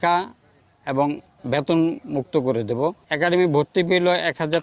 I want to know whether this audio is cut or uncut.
cut